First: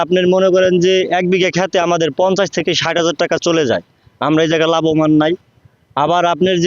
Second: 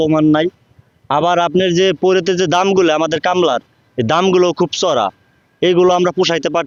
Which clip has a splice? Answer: first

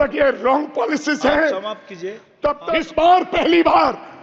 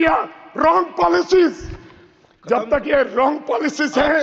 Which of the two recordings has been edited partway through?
first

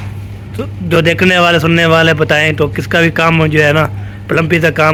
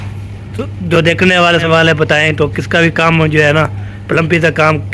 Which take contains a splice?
second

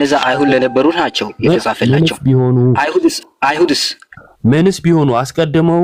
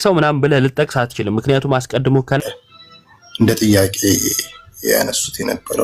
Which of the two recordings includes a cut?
second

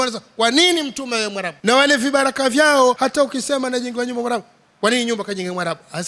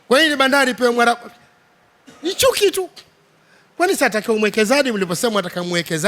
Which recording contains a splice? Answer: first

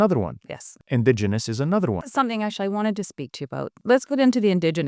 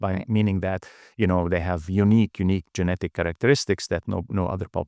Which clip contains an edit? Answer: first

